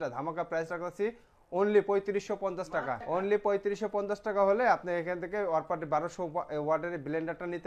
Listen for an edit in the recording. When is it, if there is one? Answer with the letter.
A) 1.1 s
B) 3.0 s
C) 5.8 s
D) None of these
B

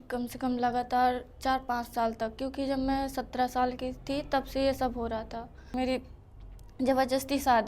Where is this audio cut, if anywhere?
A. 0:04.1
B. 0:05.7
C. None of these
B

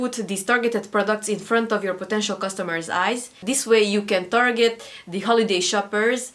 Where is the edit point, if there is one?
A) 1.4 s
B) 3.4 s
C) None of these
B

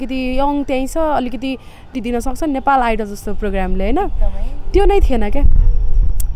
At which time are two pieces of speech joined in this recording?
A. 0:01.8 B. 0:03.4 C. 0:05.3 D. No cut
A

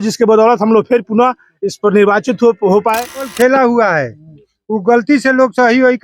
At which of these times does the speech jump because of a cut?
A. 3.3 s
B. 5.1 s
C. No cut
A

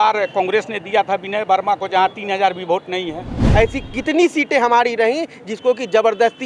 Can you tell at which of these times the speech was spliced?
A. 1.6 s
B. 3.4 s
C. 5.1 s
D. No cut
B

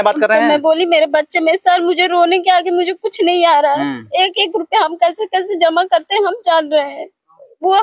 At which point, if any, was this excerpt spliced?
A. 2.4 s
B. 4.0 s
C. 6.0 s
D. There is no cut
D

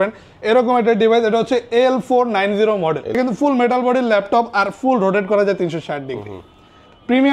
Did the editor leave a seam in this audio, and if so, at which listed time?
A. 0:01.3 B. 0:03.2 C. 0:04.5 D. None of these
B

